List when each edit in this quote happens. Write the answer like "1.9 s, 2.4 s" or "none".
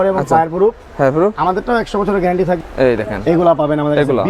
2.6 s